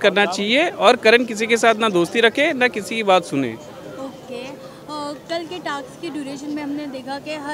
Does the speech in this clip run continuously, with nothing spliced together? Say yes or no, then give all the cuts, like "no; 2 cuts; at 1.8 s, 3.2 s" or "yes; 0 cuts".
yes; 0 cuts